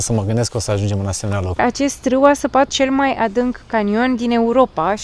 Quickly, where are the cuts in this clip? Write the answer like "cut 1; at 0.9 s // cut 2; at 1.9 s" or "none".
cut 1; at 1.6 s // cut 2; at 2.7 s